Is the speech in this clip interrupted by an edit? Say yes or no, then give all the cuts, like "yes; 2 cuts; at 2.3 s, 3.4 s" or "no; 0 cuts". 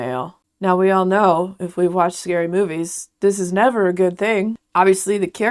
yes; 1 cut; at 4.6 s